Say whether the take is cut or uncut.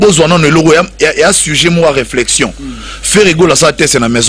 uncut